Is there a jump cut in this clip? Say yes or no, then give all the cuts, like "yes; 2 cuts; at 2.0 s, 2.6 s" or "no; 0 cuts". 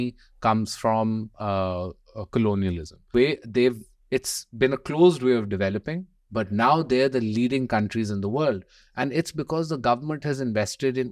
yes; 1 cut; at 3.1 s